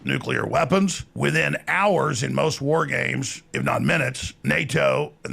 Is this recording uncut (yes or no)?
no